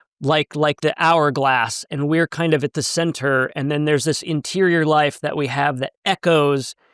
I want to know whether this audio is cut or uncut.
uncut